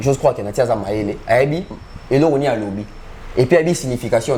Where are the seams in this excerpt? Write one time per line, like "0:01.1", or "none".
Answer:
none